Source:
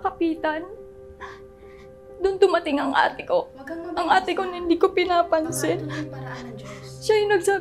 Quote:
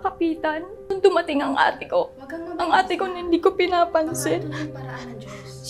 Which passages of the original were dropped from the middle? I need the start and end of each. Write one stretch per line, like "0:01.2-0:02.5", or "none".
0:00.9-0:02.3